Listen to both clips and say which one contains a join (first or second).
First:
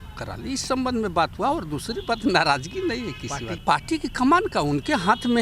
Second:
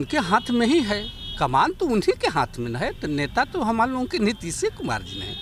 first